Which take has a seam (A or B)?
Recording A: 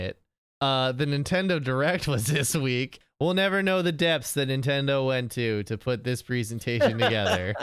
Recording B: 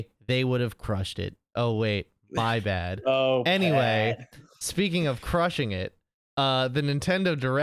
A